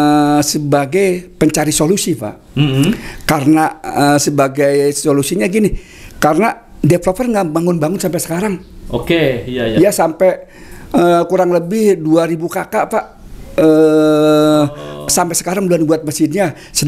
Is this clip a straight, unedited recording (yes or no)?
yes